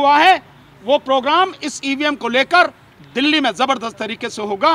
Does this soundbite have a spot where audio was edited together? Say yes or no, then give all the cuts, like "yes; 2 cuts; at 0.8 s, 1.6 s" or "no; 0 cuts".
no; 0 cuts